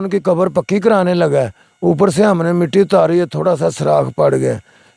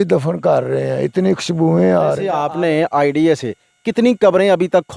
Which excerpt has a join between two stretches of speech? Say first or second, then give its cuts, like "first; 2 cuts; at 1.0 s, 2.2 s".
second; 1 cut; at 2.3 s